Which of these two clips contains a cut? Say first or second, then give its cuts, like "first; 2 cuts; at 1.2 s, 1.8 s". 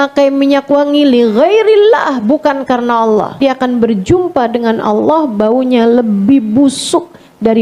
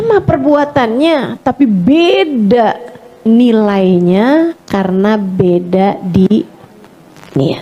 first; 1 cut; at 3.4 s